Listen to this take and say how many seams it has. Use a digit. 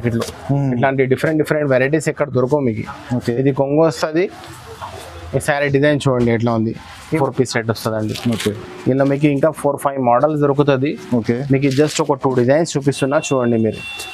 1